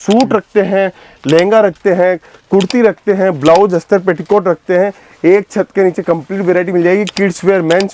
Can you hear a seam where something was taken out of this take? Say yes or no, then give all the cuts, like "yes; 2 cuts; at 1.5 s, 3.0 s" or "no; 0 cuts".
no; 0 cuts